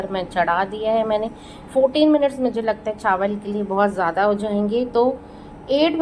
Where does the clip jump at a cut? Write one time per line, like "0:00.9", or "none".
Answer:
none